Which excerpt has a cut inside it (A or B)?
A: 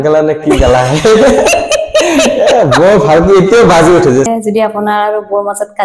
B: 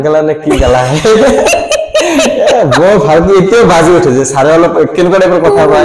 A